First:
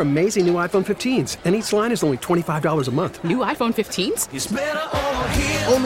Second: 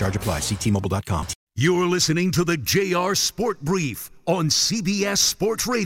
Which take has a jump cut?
second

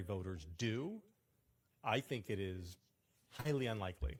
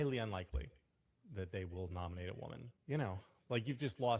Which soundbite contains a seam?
second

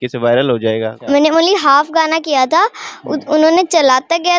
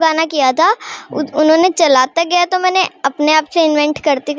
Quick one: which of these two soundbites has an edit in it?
first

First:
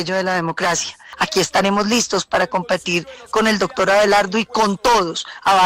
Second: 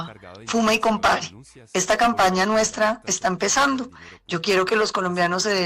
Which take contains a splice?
first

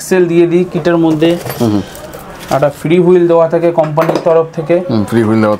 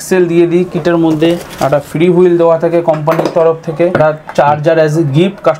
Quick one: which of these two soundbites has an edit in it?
second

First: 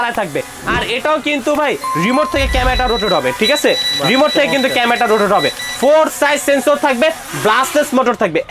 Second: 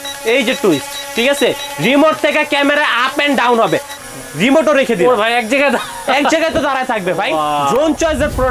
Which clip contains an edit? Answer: second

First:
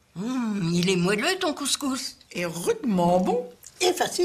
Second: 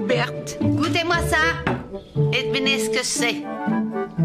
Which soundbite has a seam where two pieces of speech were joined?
first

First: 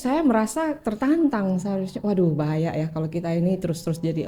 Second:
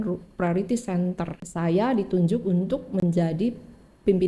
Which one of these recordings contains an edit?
second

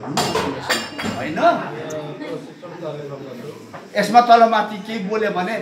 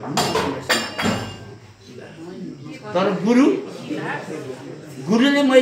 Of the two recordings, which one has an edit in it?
first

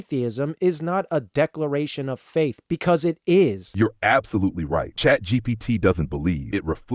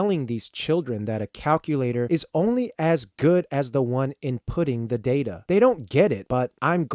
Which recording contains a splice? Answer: first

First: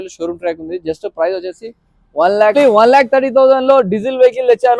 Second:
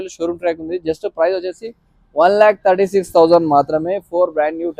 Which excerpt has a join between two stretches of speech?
first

